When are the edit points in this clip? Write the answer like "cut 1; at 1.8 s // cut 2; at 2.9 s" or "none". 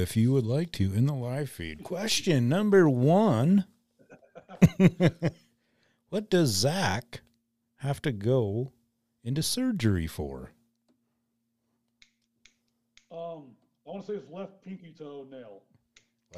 none